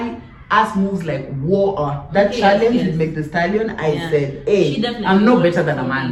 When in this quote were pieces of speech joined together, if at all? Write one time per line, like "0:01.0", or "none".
none